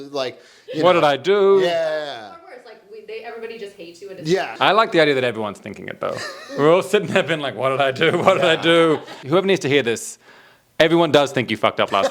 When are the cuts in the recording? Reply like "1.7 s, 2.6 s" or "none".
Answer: 4.5 s, 9.1 s

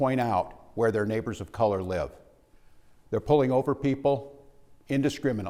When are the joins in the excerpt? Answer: none

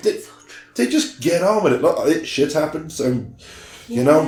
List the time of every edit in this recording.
none

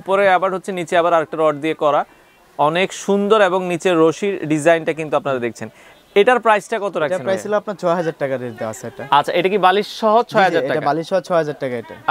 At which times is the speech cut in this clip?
none

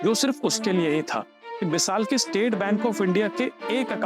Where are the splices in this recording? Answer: 1.4 s

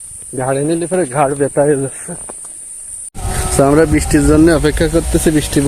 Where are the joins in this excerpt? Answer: 3.2 s

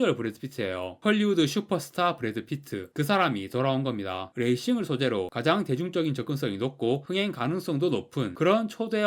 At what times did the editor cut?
4.3 s

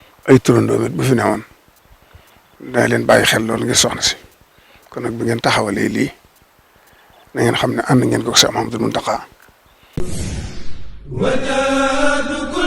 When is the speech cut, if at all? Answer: 9.9 s

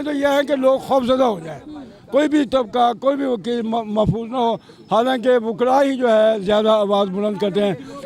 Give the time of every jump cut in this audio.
none

